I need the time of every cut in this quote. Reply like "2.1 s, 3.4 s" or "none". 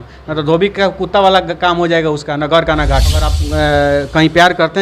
3.4 s

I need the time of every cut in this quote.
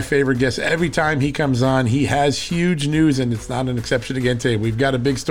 none

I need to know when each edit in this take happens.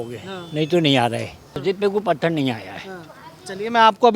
1.6 s

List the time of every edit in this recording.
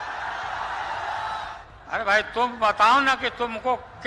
1.5 s

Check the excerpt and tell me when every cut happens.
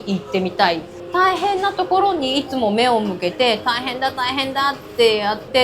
1.0 s

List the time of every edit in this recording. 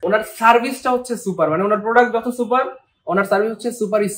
none

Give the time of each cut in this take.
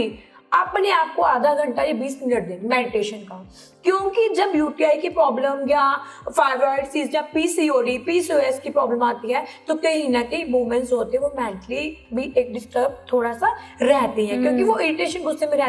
none

